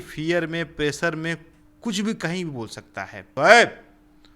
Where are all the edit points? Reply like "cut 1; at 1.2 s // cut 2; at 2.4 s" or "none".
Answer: cut 1; at 3.3 s

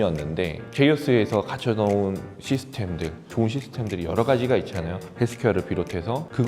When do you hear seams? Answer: cut 1; at 3.2 s

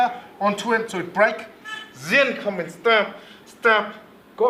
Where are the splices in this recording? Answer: none

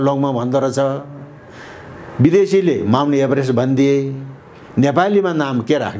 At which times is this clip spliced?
none

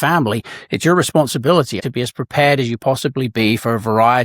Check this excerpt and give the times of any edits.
cut 1; at 1.8 s

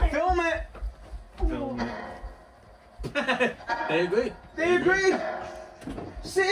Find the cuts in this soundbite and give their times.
none

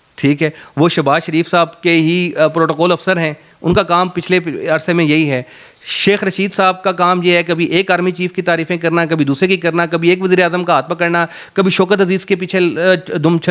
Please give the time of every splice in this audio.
none

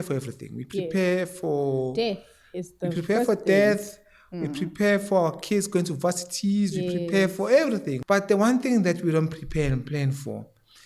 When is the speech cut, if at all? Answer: cut 1; at 7.9 s

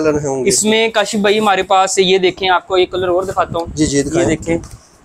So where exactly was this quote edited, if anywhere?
none

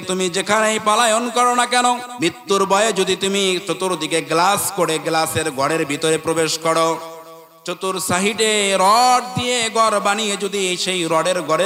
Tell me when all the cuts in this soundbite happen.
cut 1; at 2.1 s

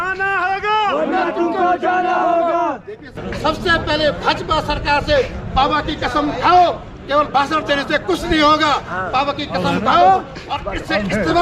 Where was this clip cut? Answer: cut 1; at 3.1 s

